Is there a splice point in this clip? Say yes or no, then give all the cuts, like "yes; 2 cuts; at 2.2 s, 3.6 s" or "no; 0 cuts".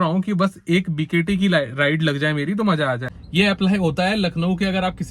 yes; 1 cut; at 3.1 s